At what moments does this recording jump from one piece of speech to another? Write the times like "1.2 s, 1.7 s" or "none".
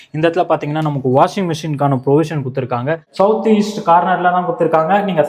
3.0 s